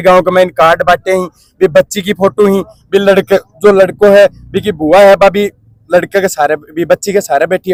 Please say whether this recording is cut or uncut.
uncut